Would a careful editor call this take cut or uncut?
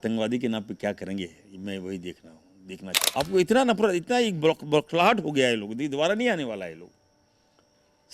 cut